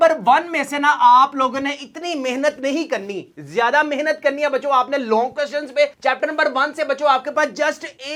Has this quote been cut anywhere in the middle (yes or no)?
no